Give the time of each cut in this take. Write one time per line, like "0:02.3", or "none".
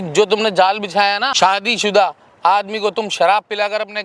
0:01.3